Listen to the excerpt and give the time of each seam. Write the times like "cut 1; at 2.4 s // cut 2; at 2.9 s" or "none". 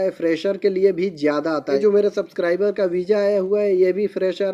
cut 1; at 1.8 s